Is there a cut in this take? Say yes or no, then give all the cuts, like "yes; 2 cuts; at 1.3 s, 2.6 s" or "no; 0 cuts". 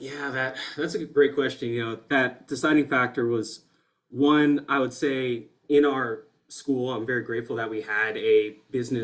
no; 0 cuts